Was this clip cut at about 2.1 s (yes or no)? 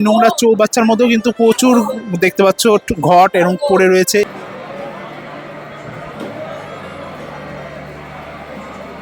no